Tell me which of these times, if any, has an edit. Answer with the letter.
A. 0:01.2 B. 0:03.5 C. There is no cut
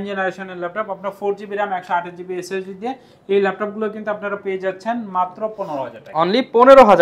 C